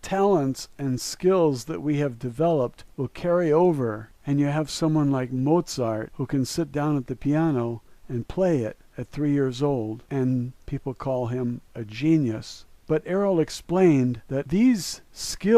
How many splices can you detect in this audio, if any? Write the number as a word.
one